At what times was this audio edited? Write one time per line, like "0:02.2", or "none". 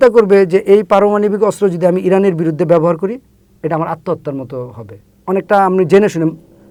none